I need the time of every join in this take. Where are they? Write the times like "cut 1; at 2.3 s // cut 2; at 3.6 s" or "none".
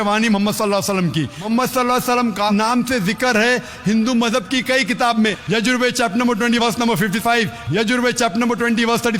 cut 1; at 1.4 s // cut 2; at 5.4 s